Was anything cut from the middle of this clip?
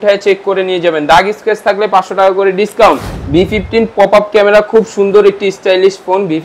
yes; 1 cut; at 3.1 s

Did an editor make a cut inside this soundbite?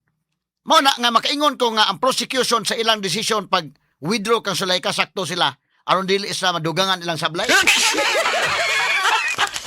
yes; 1 cut; at 8.6 s

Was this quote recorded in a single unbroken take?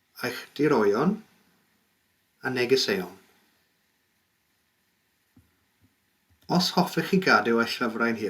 yes; 0 cuts

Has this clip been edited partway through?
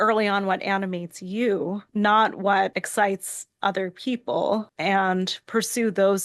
yes; 3 cuts; at 1.8 s, 2.8 s, 4.7 s

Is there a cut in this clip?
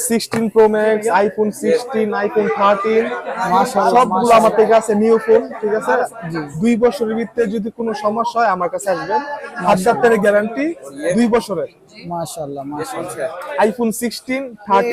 no; 0 cuts

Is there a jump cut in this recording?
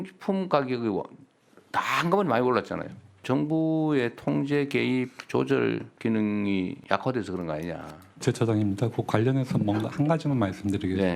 yes; 4 cuts; at 3.2 s, 5.9 s, 6.8 s, 8.2 s

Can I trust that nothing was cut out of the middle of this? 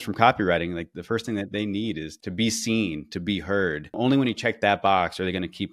no; 3 cuts; at 0.9 s, 2.1 s, 4.0 s

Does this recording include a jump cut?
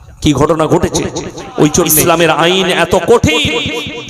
yes; 1 cut; at 2.0 s

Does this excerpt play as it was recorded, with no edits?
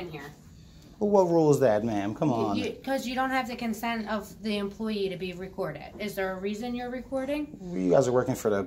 yes; 0 cuts

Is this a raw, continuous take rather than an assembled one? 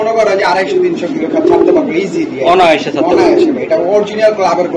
yes; 0 cuts

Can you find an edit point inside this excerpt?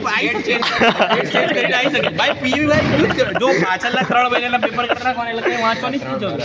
no; 0 cuts

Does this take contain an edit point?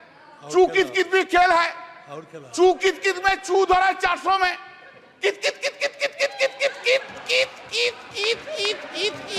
no; 0 cuts

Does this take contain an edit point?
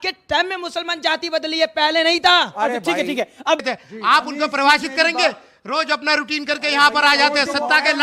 yes; 1 cut; at 3.6 s

